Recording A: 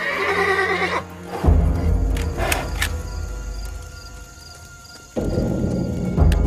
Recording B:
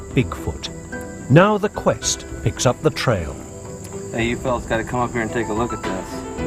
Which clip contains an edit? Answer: B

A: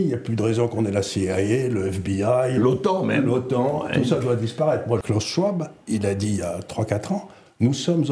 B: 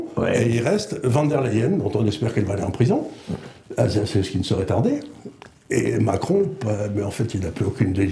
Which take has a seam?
A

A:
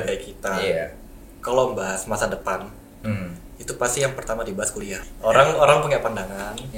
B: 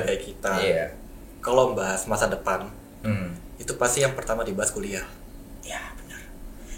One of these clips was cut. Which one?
A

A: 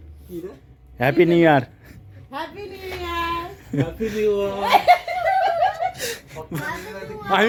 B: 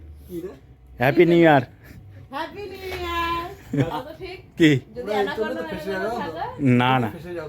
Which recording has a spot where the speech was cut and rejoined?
B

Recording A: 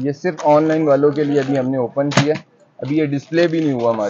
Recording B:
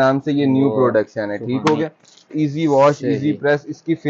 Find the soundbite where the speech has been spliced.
B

